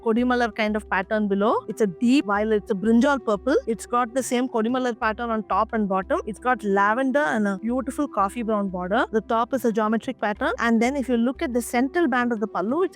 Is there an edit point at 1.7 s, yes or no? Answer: yes